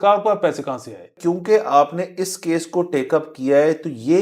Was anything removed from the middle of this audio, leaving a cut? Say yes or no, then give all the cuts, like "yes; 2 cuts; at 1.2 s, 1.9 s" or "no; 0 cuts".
yes; 1 cut; at 1.1 s